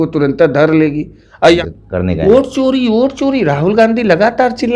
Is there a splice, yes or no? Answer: yes